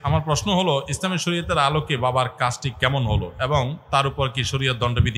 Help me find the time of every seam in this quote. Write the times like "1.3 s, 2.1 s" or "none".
none